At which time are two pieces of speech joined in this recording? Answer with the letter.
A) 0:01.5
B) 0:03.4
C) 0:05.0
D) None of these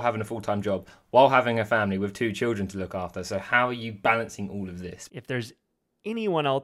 C